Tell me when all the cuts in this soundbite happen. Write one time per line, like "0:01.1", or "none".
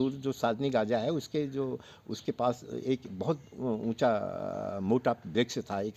none